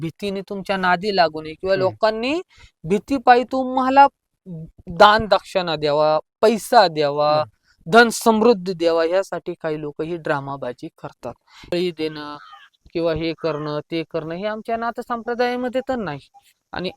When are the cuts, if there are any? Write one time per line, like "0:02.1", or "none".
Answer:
0:11.7